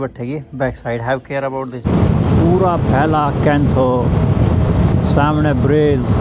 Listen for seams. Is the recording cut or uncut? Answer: cut